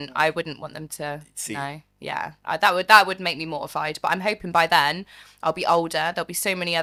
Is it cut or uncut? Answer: uncut